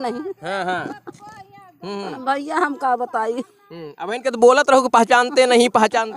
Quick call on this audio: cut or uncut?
uncut